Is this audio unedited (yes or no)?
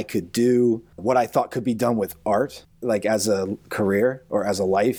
no